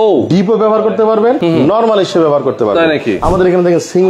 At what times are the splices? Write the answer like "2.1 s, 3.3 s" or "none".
1.4 s, 3.2 s